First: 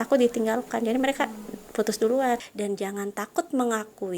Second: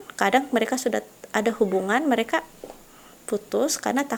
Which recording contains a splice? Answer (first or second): first